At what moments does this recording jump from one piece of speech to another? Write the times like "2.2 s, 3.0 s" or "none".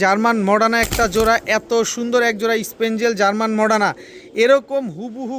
none